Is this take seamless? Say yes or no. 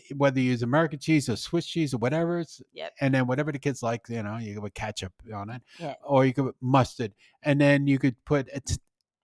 yes